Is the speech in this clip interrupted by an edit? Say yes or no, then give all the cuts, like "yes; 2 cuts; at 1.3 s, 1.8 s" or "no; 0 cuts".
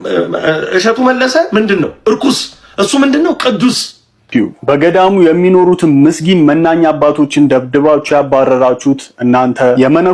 yes; 1 cut; at 4.3 s